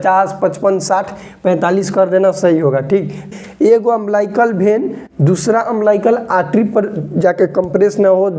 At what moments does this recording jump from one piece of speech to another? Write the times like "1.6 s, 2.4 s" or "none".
3.3 s